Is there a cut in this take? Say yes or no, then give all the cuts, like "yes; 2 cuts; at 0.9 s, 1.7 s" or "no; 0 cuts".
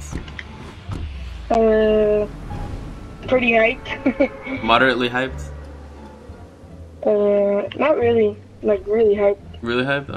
no; 0 cuts